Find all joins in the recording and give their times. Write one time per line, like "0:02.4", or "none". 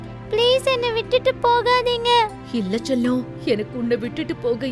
none

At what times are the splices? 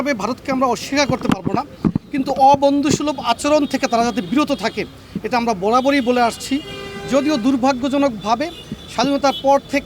none

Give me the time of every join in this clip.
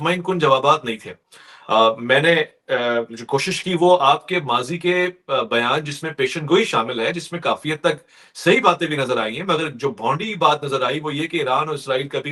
none

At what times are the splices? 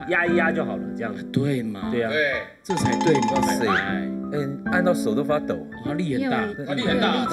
none

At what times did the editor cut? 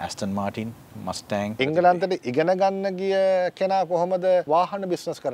0:01.6
0:04.4

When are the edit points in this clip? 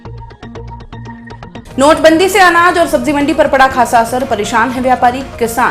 0:01.6

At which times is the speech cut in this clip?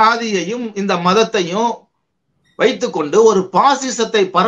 none

